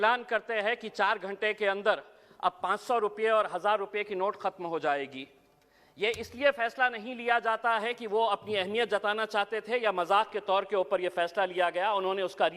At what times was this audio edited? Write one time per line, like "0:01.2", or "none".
0:01.1